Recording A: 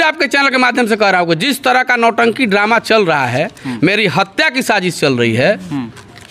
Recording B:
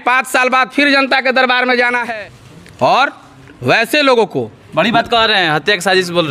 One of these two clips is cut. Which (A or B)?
B